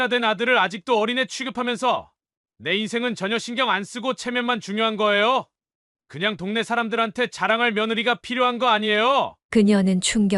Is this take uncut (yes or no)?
yes